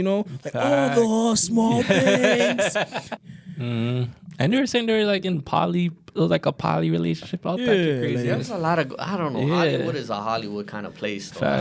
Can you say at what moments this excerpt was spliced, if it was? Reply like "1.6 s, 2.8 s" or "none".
3.1 s